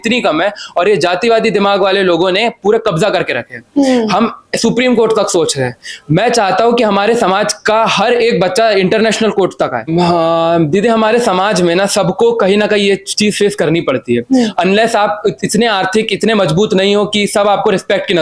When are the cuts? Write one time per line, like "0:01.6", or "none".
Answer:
0:09.9